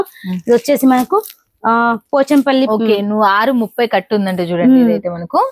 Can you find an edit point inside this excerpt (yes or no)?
yes